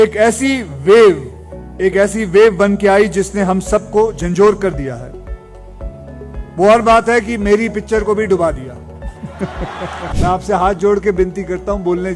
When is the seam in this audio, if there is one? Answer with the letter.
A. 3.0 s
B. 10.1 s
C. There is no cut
B